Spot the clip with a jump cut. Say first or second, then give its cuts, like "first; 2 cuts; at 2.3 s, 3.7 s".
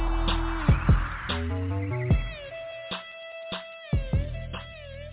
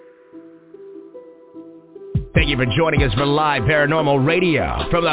second; 1 cut; at 0.9 s